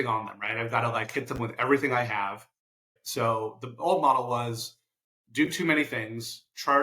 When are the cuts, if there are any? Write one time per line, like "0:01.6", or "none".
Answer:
0:02.9

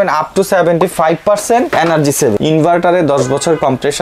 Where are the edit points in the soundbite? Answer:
0:02.0

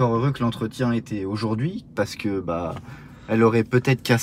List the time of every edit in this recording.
none

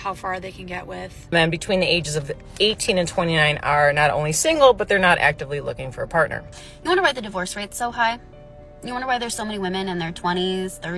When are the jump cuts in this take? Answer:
0:01.3
0:06.5

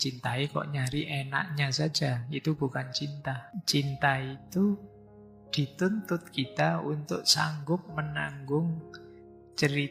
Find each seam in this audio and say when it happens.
0:03.5

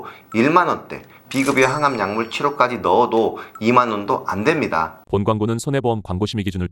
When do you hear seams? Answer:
0:04.9

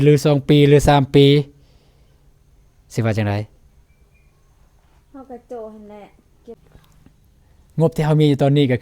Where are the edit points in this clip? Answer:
0:06.8

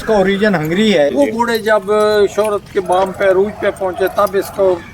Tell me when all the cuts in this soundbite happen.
0:01.1

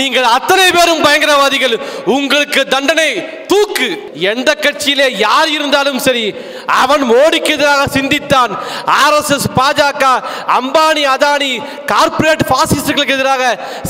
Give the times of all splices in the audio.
0:04.1

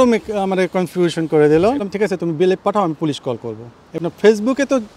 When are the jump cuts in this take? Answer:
0:01.9
0:04.0

